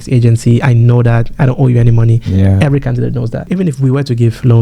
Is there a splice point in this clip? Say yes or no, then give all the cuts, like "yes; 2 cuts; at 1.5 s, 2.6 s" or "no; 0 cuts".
yes; 1 cut; at 3.4 s